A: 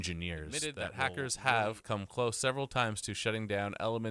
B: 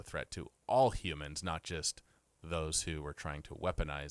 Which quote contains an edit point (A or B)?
A